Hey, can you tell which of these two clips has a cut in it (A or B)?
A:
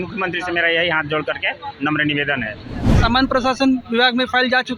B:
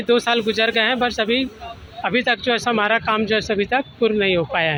A